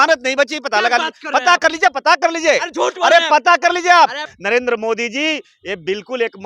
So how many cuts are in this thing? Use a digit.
1